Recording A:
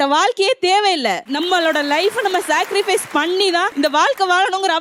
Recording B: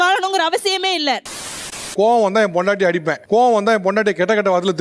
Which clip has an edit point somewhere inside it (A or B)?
B